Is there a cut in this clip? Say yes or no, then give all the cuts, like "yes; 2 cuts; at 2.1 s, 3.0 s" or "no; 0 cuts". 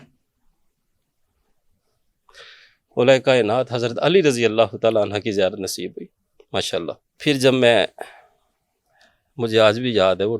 yes; 1 cut; at 7.1 s